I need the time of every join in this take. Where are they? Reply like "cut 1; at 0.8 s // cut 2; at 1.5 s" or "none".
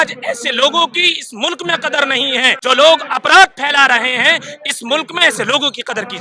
cut 1; at 2.5 s